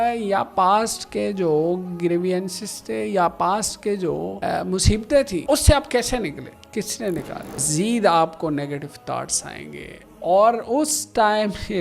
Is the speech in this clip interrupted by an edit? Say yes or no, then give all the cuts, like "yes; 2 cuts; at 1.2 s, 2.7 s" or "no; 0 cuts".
yes; 4 cuts; at 4.3 s, 5.4 s, 6.5 s, 7.7 s